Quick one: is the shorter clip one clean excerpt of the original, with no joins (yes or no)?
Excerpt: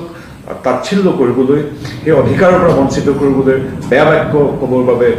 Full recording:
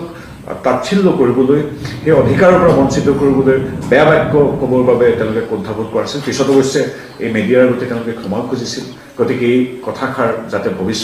yes